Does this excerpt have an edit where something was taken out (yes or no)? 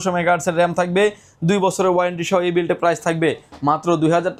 no